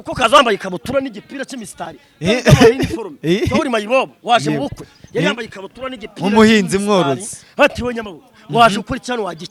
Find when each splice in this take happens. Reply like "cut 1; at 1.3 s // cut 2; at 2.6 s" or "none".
none

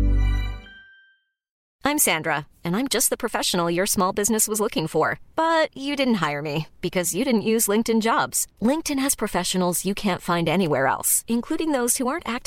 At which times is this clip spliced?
cut 1; at 1.6 s

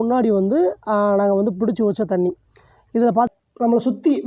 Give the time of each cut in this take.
cut 1; at 3.3 s

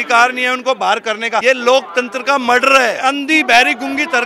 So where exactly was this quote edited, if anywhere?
cut 1; at 1.4 s // cut 2; at 3.0 s

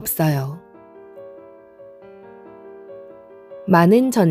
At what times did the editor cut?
none

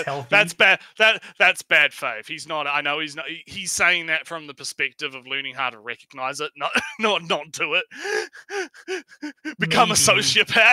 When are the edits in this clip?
none

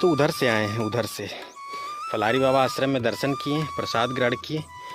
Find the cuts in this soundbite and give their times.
none

